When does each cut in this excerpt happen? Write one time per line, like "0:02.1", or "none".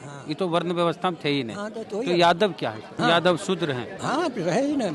0:02.9